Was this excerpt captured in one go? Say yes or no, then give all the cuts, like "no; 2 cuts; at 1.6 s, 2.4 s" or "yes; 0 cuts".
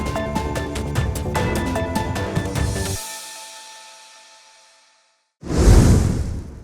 no; 1 cut; at 5.3 s